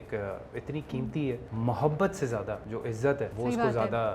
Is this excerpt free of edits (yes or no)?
no